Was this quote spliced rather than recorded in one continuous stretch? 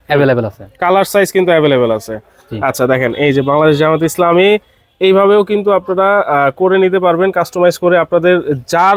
no; 0 cuts

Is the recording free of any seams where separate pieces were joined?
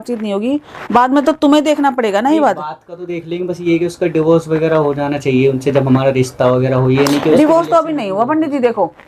yes; 0 cuts

